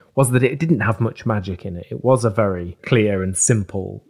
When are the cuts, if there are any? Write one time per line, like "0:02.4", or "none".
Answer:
0:02.8